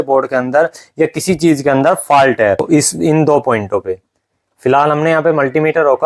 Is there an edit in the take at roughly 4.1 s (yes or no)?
no